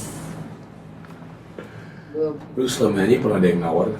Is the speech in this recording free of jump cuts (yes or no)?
no